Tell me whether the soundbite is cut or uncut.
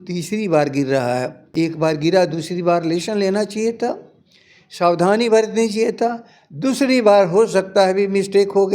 cut